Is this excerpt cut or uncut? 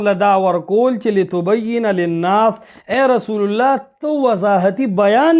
uncut